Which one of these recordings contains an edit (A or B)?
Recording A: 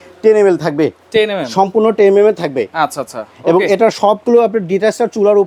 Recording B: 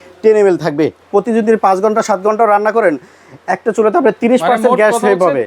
B